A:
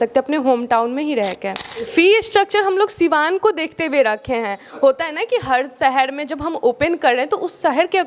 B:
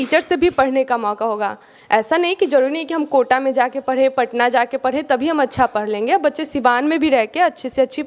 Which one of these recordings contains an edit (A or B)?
A